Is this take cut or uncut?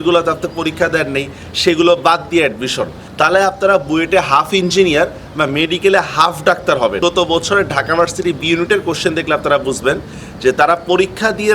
cut